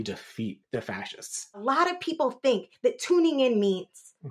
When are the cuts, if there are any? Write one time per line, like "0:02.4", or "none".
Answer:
0:01.6